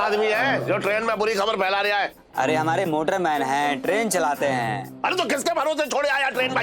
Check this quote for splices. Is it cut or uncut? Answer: cut